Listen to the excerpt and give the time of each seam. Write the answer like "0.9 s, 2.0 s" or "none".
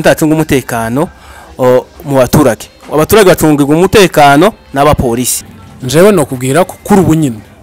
5.4 s